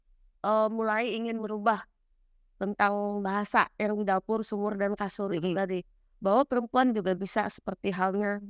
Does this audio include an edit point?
no; 0 cuts

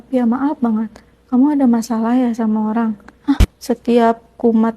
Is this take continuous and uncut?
no; 1 cut; at 3.5 s

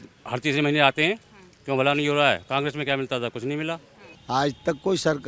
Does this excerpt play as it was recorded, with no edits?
no; 1 cut; at 4.2 s

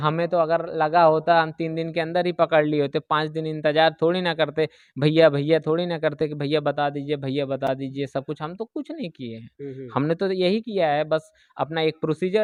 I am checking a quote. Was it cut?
no; 0 cuts

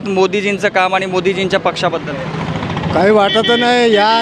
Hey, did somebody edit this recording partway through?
no; 0 cuts

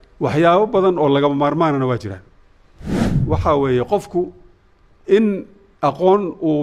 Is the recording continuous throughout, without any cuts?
no; 1 cut; at 3.1 s

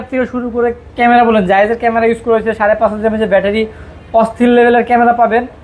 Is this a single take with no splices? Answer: yes; 0 cuts

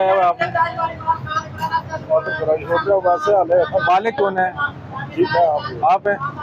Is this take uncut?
yes; 0 cuts

